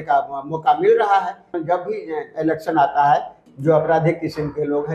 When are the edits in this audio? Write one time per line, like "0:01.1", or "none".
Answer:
0:01.5
0:03.4